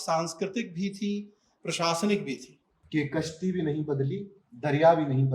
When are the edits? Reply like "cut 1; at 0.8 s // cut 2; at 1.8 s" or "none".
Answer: cut 1; at 2.8 s